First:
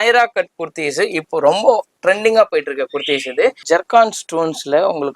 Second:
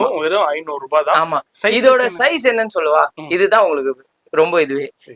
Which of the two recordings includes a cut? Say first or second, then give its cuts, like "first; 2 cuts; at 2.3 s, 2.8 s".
first; 1 cut; at 3.6 s